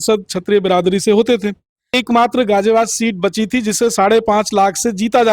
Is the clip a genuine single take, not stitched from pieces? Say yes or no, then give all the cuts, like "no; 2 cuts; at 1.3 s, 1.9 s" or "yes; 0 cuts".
no; 1 cut; at 2.0 s